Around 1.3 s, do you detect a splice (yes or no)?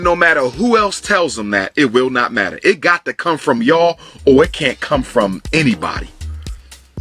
no